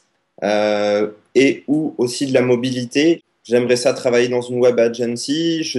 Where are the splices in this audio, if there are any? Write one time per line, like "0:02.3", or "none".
0:03.2